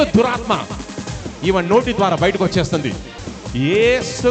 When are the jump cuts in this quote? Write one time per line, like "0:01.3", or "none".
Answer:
0:03.1